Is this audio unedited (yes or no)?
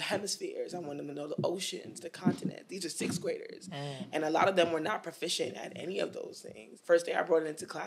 no